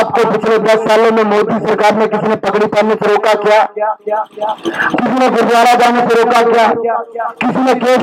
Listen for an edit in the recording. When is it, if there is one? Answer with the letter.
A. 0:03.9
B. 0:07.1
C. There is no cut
C